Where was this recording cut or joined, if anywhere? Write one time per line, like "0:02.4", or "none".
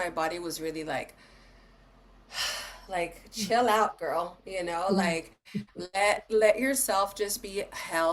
none